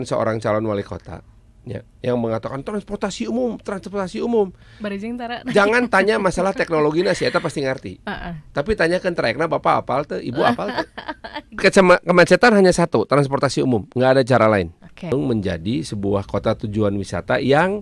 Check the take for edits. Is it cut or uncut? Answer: cut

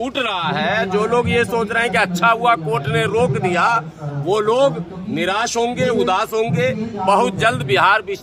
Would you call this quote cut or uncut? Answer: uncut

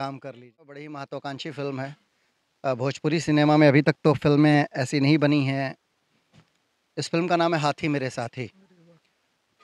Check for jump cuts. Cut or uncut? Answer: cut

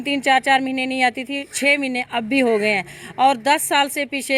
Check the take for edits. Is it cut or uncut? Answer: uncut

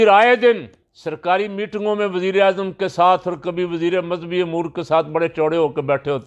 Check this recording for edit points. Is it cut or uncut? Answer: uncut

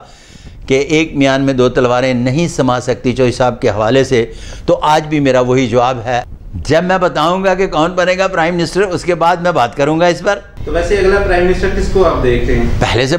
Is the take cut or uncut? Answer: cut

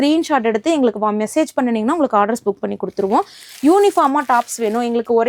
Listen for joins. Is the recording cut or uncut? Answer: uncut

